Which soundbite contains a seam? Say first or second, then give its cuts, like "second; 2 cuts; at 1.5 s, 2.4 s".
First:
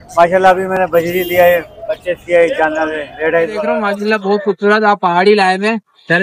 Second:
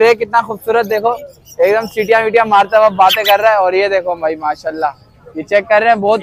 first; 1 cut; at 3.9 s